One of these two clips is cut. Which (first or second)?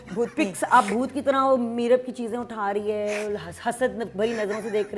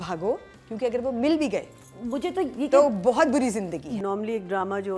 second